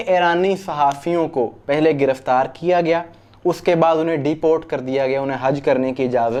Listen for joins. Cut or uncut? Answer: uncut